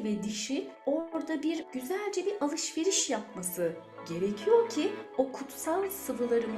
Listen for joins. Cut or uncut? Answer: uncut